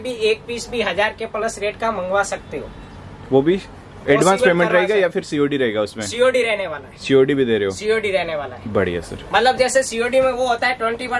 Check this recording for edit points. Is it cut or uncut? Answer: uncut